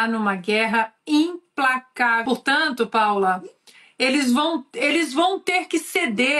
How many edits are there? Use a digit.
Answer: 1